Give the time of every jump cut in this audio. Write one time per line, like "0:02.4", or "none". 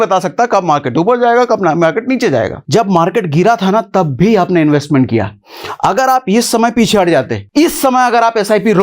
0:02.6
0:07.4